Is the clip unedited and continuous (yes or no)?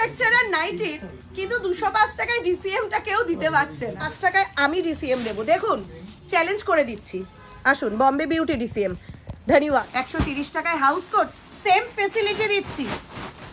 no